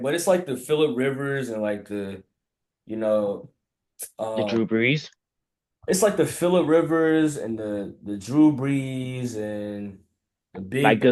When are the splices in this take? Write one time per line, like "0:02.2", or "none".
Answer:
none